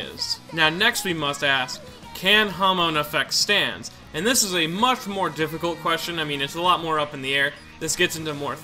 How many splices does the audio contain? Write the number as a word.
zero